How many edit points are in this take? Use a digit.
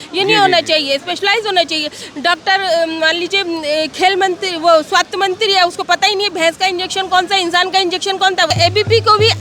1